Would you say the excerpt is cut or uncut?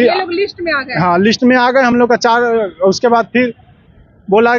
uncut